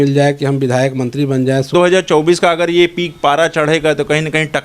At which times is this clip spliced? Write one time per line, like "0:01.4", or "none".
0:01.7